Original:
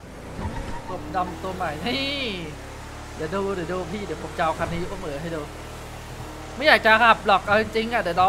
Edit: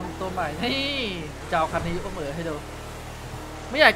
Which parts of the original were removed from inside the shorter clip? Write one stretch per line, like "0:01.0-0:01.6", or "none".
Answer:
0:02.6-0:04.3